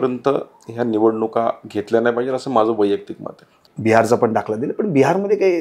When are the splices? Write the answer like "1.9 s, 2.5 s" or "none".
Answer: 3.6 s